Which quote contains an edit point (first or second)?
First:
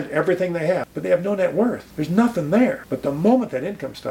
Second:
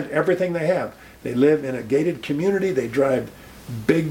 first